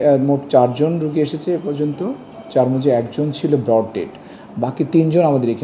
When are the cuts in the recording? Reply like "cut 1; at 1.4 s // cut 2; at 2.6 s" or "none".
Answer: none